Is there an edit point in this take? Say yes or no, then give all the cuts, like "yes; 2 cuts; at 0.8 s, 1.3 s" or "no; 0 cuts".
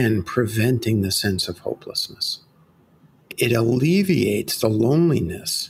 yes; 1 cut; at 3.3 s